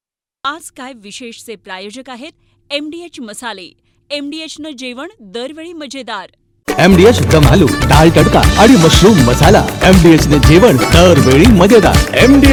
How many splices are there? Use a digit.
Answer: 0